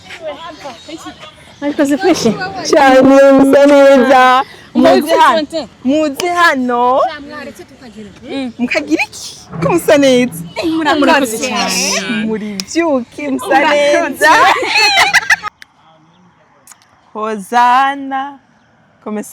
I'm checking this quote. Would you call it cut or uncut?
cut